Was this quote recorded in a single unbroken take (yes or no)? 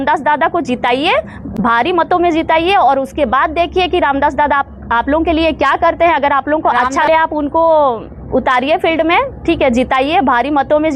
yes